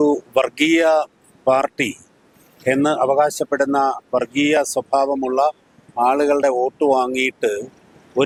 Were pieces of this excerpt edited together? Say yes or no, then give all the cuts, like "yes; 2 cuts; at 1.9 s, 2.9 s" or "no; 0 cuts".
no; 0 cuts